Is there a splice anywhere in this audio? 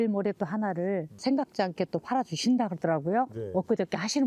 no; 0 cuts

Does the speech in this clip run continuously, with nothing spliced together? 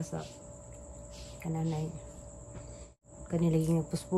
no; 1 cut; at 3.0 s

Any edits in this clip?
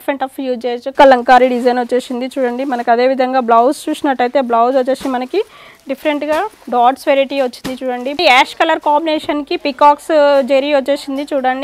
yes; 2 cuts; at 0.9 s, 8.2 s

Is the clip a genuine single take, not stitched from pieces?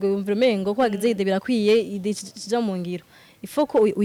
yes; 0 cuts

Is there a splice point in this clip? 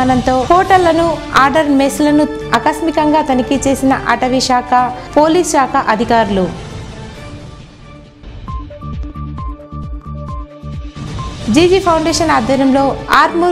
no; 0 cuts

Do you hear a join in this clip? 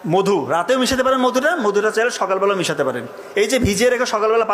no; 0 cuts

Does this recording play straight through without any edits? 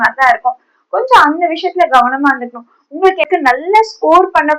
no; 1 cut; at 3.3 s

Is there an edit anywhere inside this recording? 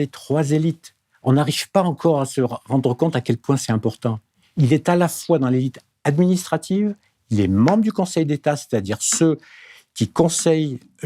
no; 0 cuts

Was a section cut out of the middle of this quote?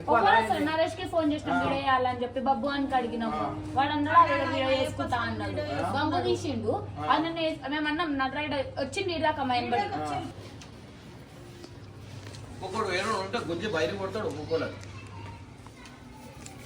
yes; 1 cut; at 10.3 s

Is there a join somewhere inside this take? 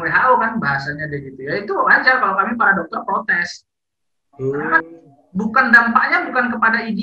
no; 0 cuts

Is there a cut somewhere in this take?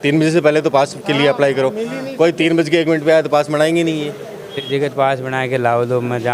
yes; 1 cut; at 4.6 s

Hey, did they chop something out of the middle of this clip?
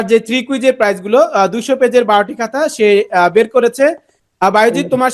no; 0 cuts

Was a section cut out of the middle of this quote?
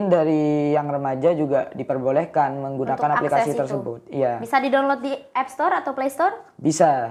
no; 0 cuts

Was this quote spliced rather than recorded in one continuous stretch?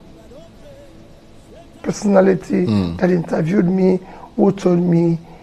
no; 0 cuts

